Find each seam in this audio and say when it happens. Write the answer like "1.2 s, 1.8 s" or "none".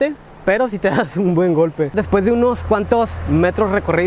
1.9 s